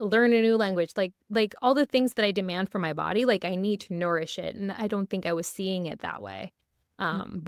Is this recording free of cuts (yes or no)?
yes